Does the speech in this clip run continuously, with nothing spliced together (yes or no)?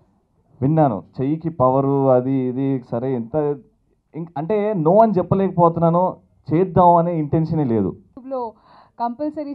no